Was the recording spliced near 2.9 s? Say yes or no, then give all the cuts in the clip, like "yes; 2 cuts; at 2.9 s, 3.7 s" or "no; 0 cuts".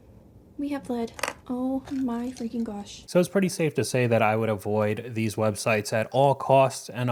no; 0 cuts